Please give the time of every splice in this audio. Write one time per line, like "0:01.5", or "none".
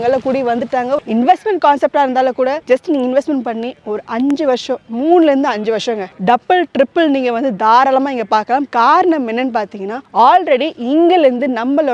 none